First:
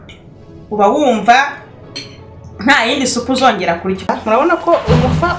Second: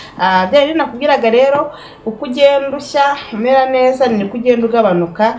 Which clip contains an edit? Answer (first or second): first